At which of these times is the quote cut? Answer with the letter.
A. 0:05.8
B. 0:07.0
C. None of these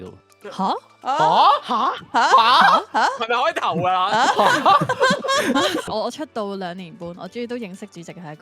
A